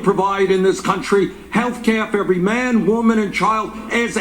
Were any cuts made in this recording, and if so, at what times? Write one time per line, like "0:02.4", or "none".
none

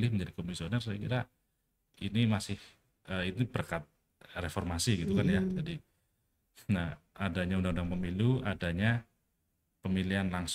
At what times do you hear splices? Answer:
none

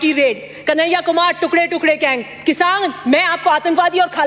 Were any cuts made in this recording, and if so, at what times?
none

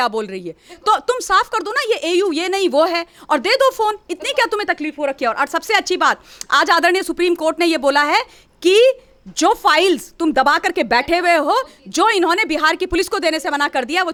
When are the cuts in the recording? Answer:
none

